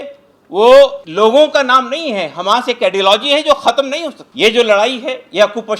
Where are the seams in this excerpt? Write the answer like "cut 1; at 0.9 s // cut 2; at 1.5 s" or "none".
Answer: cut 1; at 1.0 s // cut 2; at 4.2 s